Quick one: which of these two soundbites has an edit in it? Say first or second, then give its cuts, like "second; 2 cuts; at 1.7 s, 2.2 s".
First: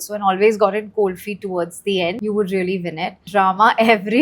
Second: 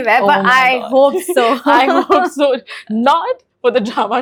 first; 2 cuts; at 2.2 s, 3.3 s